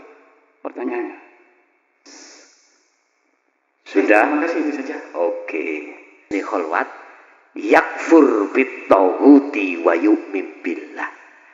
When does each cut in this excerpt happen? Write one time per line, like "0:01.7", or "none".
0:06.3